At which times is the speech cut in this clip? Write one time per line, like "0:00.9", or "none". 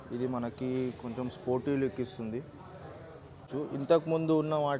0:03.5